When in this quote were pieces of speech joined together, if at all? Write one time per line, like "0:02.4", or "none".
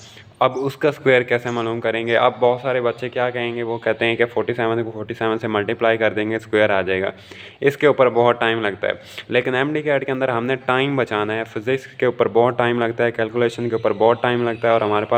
none